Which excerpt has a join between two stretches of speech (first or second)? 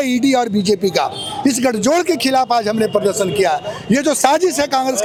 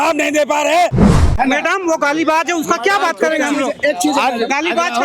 second